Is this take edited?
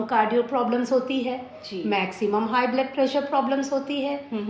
no; 0 cuts

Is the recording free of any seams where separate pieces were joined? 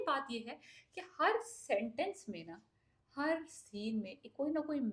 yes; 0 cuts

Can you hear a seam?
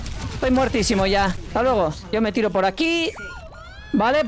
yes; 1 cut; at 1.4 s

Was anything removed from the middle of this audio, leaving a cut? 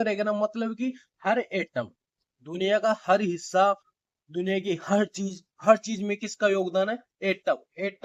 no; 0 cuts

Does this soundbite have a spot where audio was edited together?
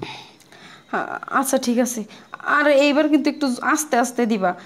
no; 0 cuts

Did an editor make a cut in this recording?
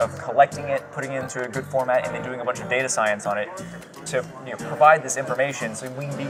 no; 0 cuts

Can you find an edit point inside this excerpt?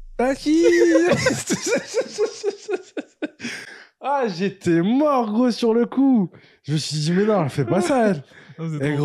no; 0 cuts

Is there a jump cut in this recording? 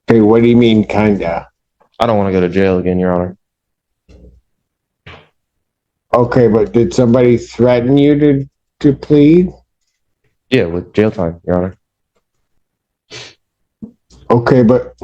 no; 0 cuts

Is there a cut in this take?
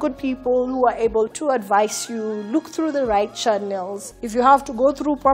yes; 1 cut; at 1.3 s

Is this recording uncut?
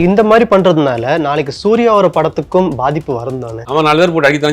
no; 1 cut; at 3.5 s

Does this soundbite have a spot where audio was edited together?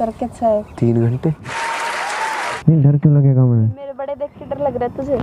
yes; 2 cuts; at 1.5 s, 2.5 s

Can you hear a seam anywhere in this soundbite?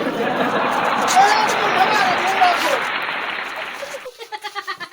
no; 0 cuts

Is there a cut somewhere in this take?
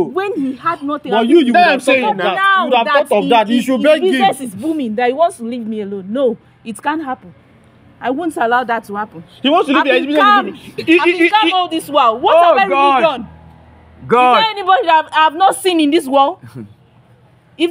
no; 0 cuts

